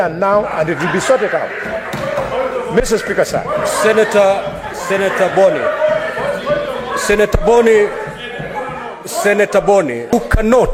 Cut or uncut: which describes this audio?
uncut